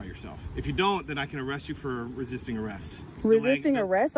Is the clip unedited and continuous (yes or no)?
yes